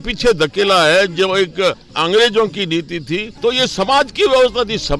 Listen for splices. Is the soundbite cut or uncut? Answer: cut